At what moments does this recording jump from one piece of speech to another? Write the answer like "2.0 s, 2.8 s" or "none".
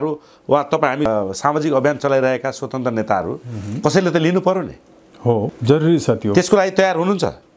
1.1 s, 5.5 s